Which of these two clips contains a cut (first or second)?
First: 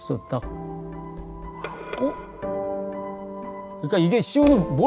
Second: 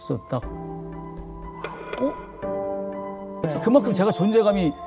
second